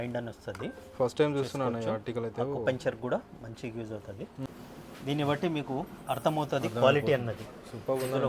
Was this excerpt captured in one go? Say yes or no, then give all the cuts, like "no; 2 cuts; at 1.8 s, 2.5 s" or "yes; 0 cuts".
no; 1 cut; at 4.4 s